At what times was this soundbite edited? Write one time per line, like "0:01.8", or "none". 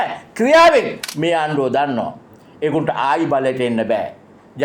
0:01.0